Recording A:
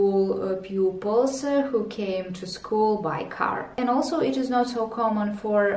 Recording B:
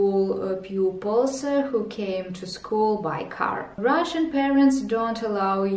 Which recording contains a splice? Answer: B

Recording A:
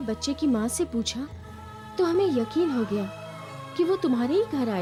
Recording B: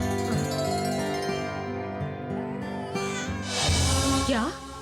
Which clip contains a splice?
B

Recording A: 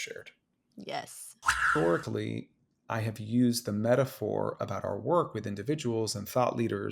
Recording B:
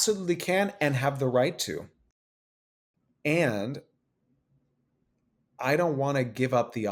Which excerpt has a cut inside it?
A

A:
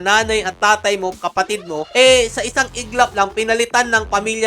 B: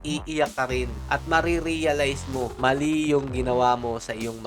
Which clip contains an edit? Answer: B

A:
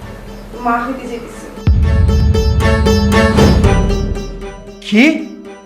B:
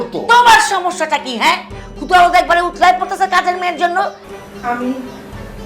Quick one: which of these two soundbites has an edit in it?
B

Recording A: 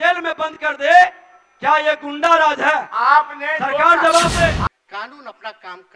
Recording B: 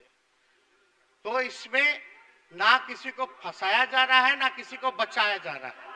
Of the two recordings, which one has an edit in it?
A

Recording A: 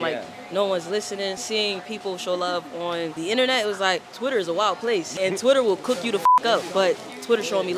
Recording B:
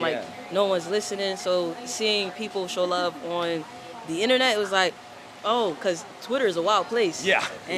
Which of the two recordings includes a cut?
A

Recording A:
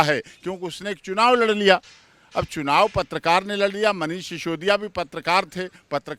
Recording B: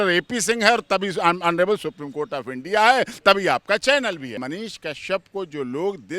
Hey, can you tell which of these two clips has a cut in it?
B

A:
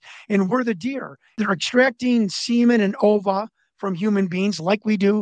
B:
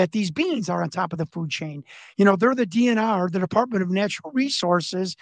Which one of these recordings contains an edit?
A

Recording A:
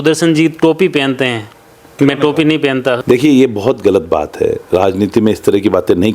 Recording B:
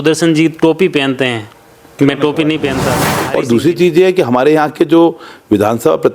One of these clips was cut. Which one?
B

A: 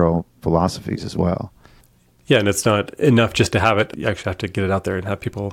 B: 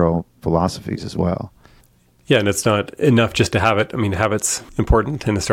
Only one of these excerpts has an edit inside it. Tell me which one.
A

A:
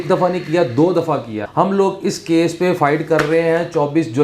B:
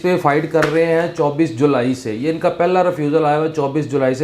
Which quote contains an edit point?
A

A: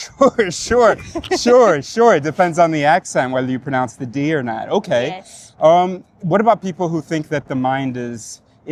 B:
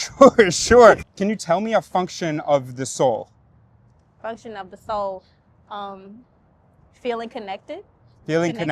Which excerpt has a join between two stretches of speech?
B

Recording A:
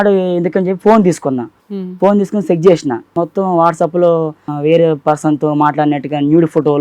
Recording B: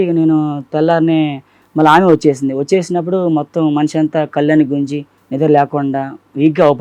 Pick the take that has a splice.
A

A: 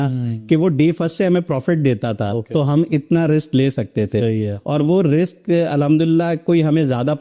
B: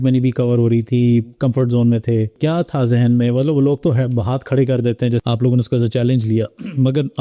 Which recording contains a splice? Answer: B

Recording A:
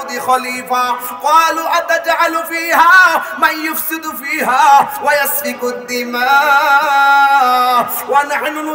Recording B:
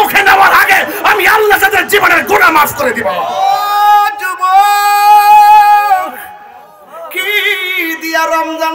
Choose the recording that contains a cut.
B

